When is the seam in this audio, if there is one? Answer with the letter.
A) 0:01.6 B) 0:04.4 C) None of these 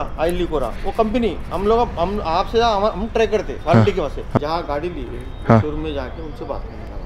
B